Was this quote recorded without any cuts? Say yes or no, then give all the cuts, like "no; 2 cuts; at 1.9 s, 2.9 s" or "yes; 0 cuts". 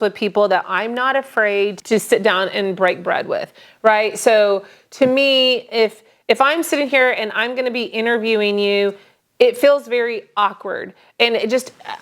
no; 1 cut; at 1.8 s